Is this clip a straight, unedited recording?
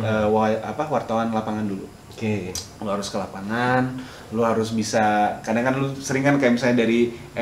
yes; 0 cuts

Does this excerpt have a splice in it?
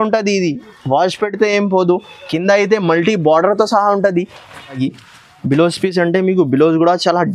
yes; 1 cut; at 4.8 s

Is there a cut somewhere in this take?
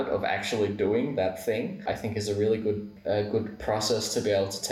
yes; 2 cuts; at 1.8 s, 2.9 s

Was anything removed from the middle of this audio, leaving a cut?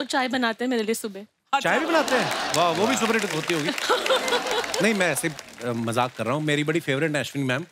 no; 0 cuts

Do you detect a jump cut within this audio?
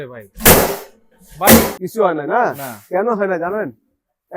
yes; 1 cut; at 1.7 s

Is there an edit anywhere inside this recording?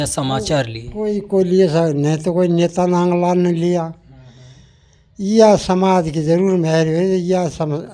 no; 0 cuts

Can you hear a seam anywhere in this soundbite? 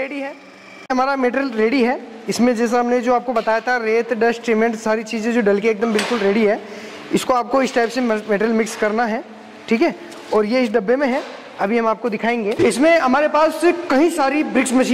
yes; 2 cuts; at 0.9 s, 12.6 s

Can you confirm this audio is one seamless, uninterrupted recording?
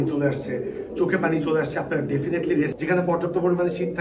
no; 1 cut; at 2.7 s

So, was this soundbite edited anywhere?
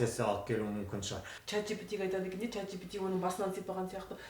yes; 1 cut; at 1.3 s

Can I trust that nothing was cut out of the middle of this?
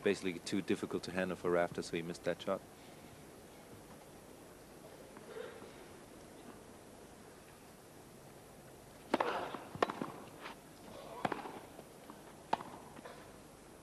yes; 0 cuts

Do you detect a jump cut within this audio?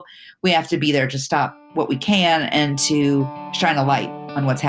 yes; 2 cuts; at 1.6 s, 3.4 s

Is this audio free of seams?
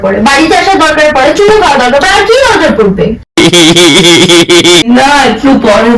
no; 1 cut; at 4.8 s

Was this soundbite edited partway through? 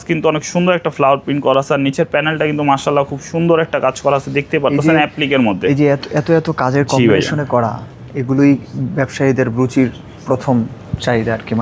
no; 0 cuts

